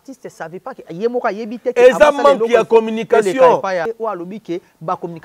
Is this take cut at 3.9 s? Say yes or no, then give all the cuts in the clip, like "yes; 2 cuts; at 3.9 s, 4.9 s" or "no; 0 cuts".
yes; 1 cut; at 3.9 s